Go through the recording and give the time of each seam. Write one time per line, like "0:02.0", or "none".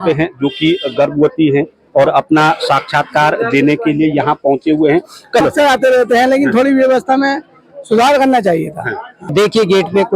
0:05.4
0:09.3